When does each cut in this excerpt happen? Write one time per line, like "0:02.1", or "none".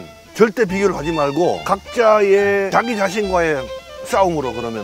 0:01.6
0:02.7